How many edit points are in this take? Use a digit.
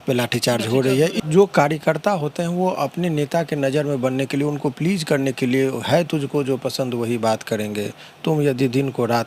1